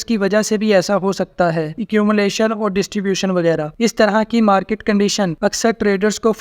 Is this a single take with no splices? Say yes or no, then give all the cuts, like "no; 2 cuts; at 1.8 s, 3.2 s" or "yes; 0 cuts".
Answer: no; 3 cuts; at 1.8 s, 3.7 s, 5.3 s